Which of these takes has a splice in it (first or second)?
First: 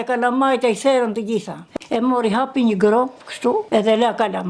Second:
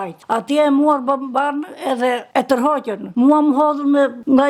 first